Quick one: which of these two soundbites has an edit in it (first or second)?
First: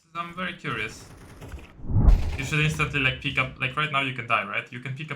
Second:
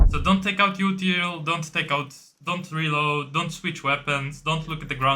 first